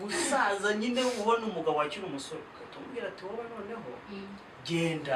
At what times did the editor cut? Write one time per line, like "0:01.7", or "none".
none